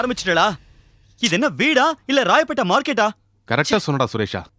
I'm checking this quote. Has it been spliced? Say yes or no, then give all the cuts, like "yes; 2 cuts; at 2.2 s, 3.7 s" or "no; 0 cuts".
no; 0 cuts